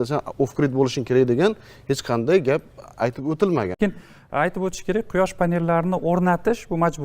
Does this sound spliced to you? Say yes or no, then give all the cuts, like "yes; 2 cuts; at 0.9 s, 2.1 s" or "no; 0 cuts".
yes; 1 cut; at 3.8 s